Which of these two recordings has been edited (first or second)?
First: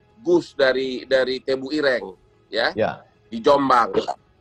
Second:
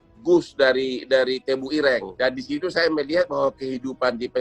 second